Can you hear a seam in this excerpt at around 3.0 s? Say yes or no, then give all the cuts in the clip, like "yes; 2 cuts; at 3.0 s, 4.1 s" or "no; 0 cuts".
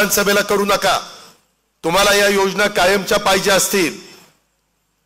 no; 0 cuts